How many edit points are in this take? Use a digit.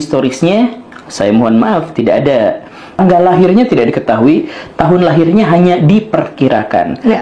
1